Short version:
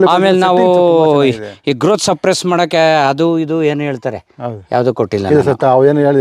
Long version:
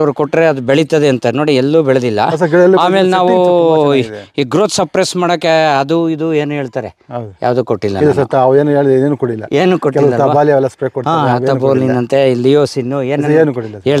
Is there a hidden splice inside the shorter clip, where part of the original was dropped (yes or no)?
no